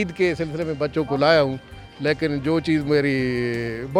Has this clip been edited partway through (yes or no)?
no